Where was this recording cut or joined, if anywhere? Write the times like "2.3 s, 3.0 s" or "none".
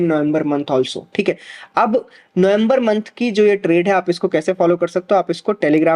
none